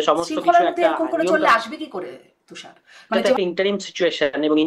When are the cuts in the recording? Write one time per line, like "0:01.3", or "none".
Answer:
0:03.4